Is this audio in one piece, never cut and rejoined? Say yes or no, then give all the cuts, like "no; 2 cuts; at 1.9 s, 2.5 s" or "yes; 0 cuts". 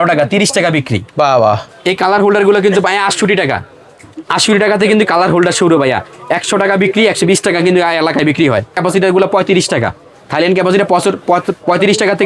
no; 2 cuts; at 1.6 s, 8.8 s